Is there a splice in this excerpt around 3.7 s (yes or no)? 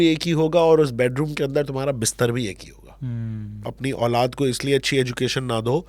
yes